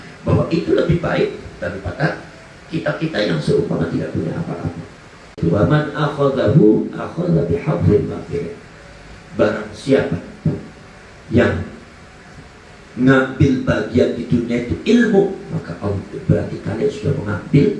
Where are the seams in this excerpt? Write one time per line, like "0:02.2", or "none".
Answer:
0:05.4